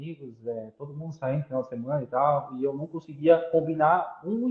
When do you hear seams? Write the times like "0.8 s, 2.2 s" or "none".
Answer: none

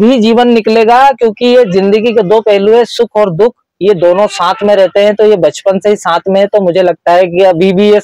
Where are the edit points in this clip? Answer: none

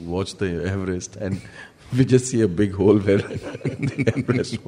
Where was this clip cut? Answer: none

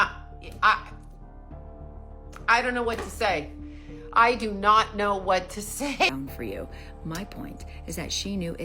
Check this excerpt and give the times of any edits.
6.1 s

